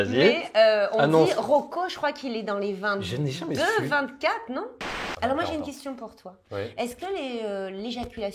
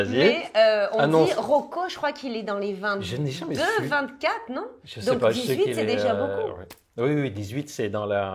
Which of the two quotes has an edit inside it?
first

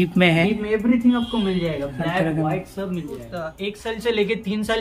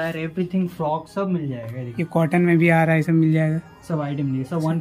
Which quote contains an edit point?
first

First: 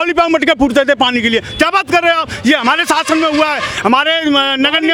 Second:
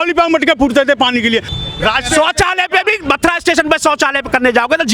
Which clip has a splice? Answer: second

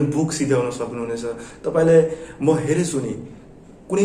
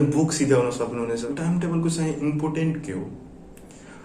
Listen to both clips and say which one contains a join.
second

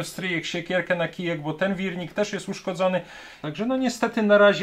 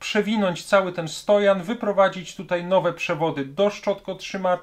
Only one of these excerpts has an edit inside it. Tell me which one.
first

